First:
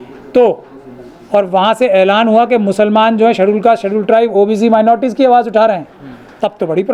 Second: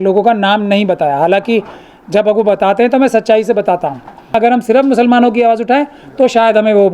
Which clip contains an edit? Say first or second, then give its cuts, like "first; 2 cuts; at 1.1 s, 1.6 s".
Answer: second; 1 cut; at 4.3 s